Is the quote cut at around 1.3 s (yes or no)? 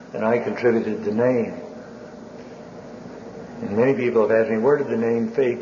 no